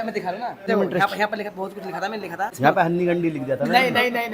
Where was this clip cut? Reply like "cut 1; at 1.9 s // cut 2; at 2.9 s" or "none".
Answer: cut 1; at 0.7 s // cut 2; at 2.5 s